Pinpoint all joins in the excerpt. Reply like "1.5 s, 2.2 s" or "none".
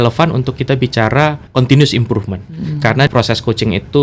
1.4 s, 3.1 s